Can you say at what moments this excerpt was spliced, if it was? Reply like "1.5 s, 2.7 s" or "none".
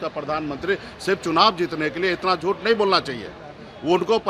none